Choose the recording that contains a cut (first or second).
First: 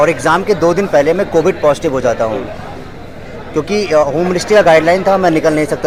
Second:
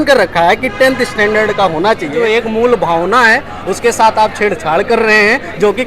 second